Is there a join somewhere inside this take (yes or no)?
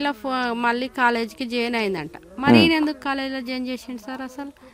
no